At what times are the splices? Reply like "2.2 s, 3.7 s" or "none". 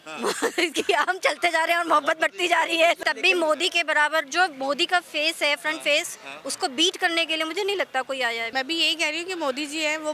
3.0 s, 8.5 s